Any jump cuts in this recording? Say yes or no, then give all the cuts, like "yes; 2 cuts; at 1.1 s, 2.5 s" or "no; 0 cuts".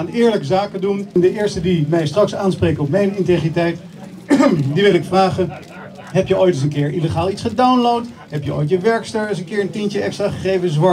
yes; 1 cut; at 1.1 s